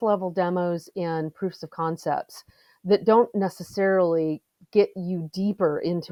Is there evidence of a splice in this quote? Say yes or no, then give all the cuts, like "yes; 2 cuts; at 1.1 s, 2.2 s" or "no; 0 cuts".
no; 0 cuts